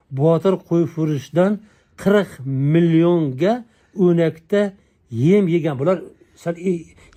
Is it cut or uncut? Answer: uncut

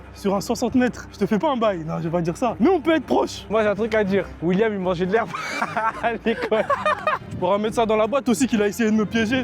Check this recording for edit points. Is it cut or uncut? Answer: cut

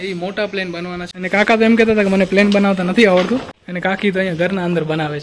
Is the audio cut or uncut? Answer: cut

